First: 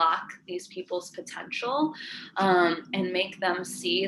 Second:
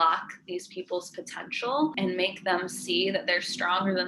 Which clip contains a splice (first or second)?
second